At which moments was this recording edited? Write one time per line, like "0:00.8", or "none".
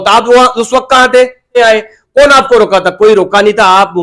0:01.6